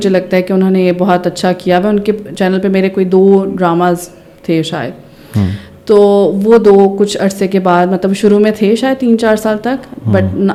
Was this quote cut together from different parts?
no; 0 cuts

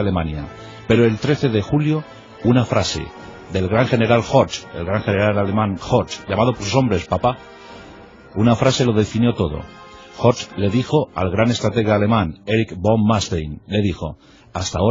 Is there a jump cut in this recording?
no; 0 cuts

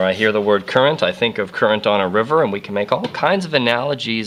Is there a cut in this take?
no; 0 cuts

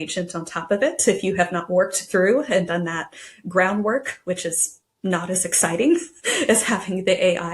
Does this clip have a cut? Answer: no; 0 cuts

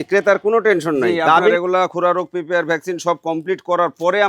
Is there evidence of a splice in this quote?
yes; 1 cut; at 1.5 s

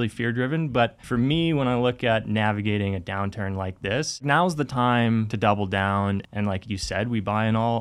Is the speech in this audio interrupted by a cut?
yes; 4 cuts; at 1.0 s, 4.2 s, 5.3 s, 6.2 s

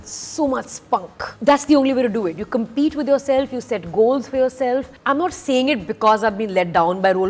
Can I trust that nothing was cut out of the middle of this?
no; 2 cuts; at 1.3 s, 4.9 s

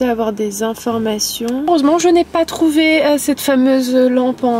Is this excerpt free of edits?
yes; 0 cuts

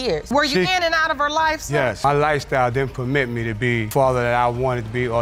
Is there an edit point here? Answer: no; 0 cuts

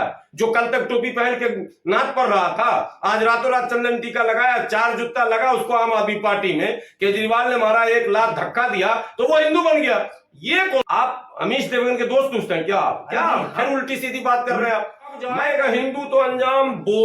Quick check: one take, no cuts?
no; 2 cuts; at 10.8 s, 15.3 s

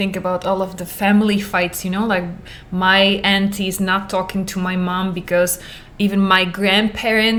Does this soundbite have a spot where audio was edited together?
no; 0 cuts

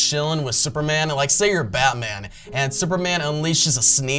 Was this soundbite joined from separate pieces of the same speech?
no; 0 cuts

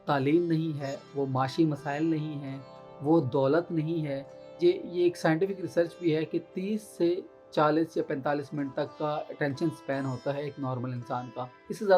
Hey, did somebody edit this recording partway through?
yes; 1 cut; at 4.5 s

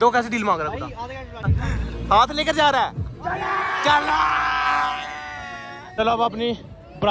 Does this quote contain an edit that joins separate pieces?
yes; 2 cuts; at 1.4 s, 5.9 s

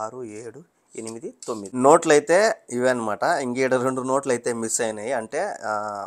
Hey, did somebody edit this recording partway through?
yes; 1 cut; at 1.6 s

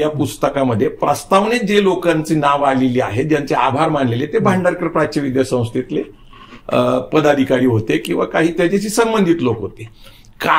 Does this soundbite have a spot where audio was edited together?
no; 0 cuts

